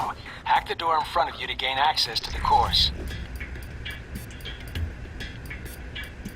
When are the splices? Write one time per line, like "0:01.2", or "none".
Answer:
0:02.7